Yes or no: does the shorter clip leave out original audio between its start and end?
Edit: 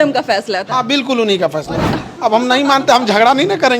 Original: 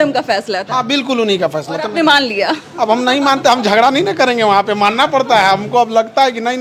yes